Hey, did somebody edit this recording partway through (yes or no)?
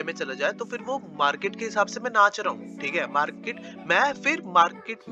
no